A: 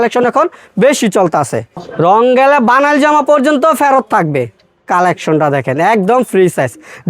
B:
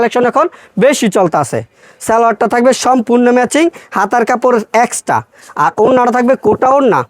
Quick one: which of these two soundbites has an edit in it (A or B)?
A